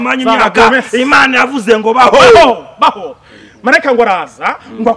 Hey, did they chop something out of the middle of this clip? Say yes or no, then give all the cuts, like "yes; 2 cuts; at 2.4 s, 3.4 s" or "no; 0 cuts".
no; 0 cuts